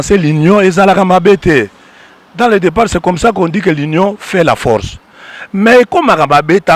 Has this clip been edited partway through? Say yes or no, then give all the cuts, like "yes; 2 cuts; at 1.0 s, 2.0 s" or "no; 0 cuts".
no; 0 cuts